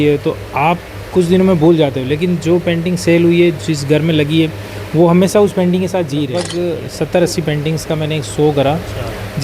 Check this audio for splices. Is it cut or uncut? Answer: cut